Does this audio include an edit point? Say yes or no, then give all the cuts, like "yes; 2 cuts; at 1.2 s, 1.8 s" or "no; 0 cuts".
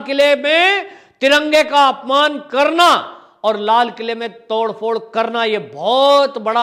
no; 0 cuts